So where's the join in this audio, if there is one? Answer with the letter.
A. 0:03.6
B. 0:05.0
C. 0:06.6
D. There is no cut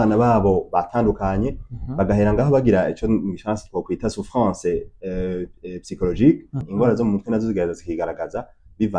C